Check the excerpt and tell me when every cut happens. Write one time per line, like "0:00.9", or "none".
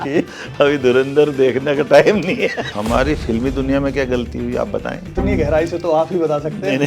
0:02.7
0:05.1